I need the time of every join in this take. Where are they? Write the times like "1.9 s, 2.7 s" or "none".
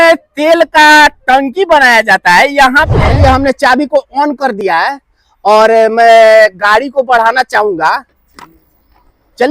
2.9 s